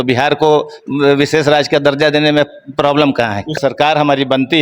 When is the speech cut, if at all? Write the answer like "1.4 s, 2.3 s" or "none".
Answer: 3.5 s